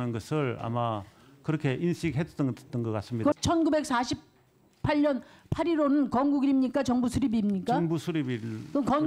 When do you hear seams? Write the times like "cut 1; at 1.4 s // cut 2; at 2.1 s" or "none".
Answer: cut 1; at 3.3 s